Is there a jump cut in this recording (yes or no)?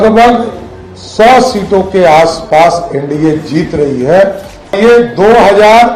yes